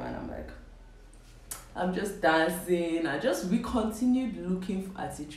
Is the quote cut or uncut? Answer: uncut